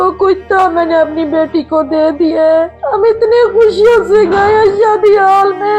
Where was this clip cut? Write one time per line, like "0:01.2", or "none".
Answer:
0:02.8